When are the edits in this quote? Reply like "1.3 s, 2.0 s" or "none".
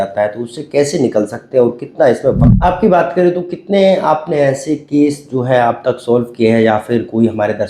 2.5 s